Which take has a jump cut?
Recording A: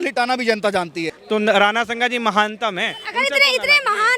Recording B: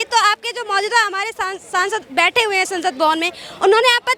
A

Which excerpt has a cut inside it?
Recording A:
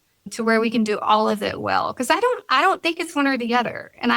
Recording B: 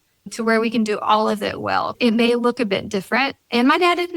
B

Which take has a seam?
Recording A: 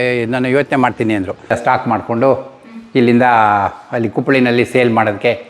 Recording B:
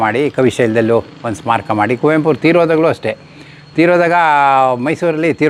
A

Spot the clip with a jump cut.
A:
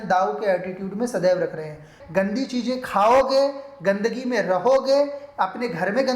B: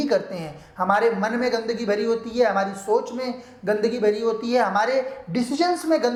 A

